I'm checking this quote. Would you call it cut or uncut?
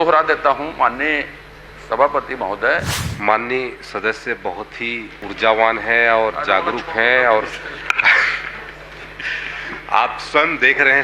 cut